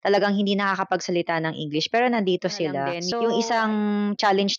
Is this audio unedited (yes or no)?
no